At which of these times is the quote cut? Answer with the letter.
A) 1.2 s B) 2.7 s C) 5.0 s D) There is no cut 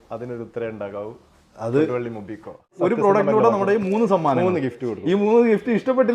B